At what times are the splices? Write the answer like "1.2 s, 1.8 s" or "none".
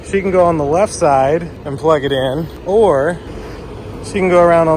2.5 s